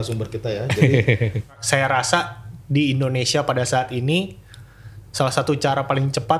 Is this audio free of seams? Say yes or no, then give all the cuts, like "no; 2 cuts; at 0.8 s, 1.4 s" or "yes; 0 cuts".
no; 1 cut; at 1.6 s